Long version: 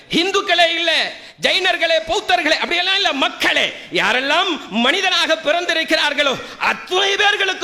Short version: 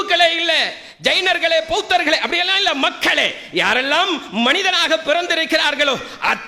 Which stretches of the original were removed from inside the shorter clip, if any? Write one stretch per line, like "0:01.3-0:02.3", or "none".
none